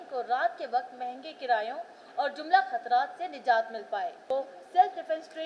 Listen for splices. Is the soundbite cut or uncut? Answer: cut